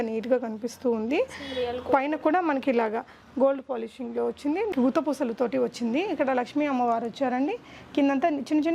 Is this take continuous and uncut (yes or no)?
no